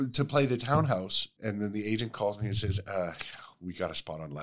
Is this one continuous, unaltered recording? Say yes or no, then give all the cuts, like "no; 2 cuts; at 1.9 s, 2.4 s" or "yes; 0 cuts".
no; 1 cut; at 1.3 s